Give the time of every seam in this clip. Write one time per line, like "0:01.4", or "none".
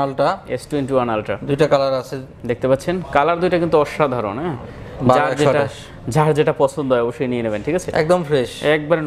none

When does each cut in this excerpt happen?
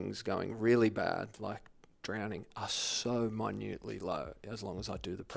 none

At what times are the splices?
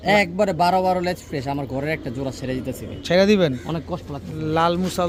none

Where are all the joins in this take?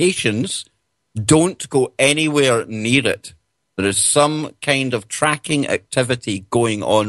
0:04.9

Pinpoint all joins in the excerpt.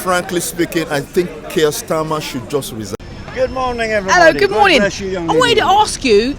0:03.0

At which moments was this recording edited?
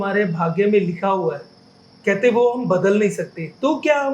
none

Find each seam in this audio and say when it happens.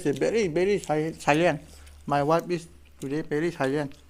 none

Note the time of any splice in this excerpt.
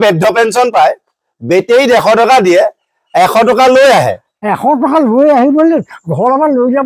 none

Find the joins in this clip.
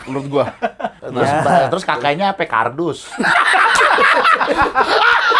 0:01.0

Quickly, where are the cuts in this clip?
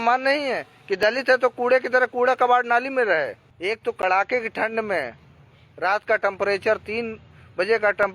0:03.5

